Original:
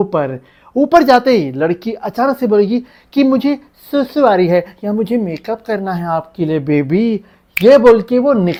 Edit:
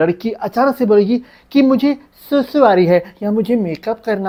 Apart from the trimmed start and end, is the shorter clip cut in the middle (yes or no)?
no